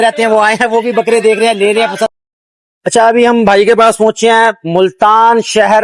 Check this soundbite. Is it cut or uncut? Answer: cut